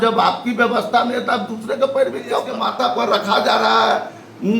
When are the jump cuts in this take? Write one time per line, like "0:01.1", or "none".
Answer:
0:02.3